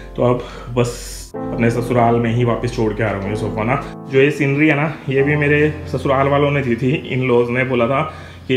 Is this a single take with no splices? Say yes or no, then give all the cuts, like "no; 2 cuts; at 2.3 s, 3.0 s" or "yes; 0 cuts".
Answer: no; 2 cuts; at 1.4 s, 3.9 s